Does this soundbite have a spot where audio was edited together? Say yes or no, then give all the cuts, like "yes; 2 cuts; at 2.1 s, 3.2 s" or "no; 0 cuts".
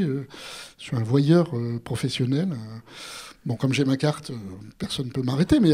no; 0 cuts